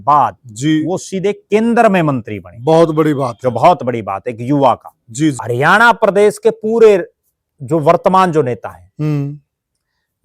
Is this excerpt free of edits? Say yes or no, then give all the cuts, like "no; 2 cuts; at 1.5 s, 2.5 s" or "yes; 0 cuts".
no; 1 cut; at 5.4 s